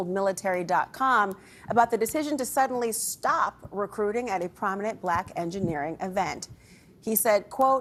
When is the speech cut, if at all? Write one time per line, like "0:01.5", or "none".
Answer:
none